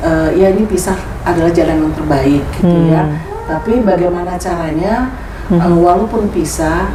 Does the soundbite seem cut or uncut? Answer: uncut